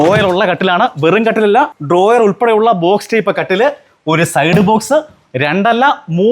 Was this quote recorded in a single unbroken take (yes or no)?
no